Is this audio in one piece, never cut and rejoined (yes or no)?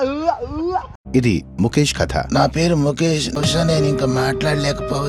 no